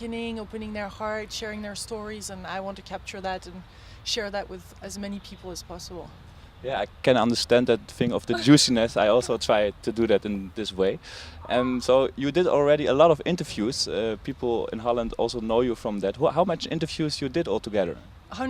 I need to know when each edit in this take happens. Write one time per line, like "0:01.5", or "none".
0:02.2